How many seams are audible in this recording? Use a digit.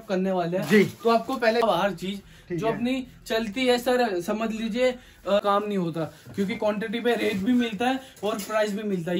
2